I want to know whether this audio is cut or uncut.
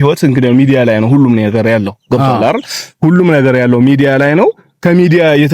uncut